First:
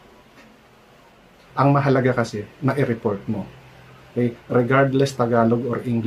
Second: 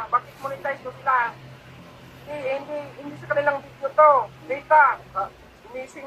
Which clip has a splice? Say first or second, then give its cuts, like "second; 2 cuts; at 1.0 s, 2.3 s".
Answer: first; 1 cut; at 1.4 s